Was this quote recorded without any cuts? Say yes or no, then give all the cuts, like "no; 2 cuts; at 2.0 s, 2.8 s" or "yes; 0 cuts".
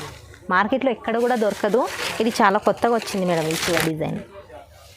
no; 1 cut; at 3.7 s